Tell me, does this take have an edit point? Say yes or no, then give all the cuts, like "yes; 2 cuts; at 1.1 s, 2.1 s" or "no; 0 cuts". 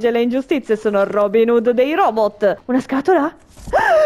yes; 1 cut; at 2.6 s